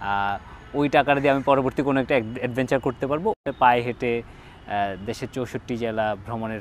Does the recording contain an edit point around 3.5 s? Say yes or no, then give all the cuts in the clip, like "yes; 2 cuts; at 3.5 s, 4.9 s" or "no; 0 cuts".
yes; 1 cut; at 3.5 s